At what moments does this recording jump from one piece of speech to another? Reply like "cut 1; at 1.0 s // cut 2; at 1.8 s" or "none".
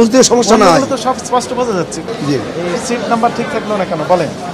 cut 1; at 2.0 s